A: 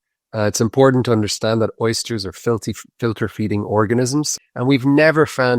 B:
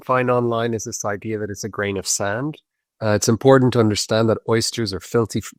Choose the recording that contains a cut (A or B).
A